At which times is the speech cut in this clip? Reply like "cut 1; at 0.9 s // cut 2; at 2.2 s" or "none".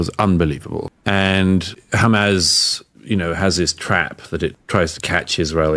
cut 1; at 0.9 s // cut 2; at 1.8 s // cut 3; at 4.6 s